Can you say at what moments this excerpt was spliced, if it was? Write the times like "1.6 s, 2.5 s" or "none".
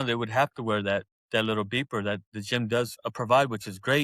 3.0 s